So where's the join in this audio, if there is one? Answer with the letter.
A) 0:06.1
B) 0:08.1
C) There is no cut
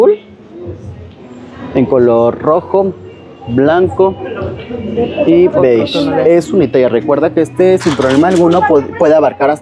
C